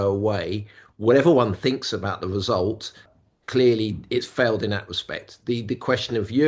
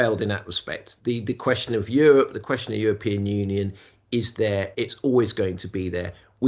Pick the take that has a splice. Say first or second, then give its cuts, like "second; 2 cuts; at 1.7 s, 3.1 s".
first; 1 cut; at 3.1 s